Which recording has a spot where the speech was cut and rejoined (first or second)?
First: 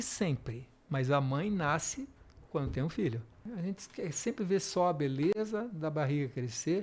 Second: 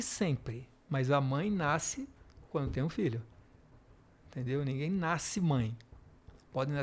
first